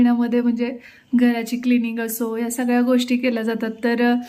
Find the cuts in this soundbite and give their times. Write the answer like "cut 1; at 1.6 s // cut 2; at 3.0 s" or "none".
none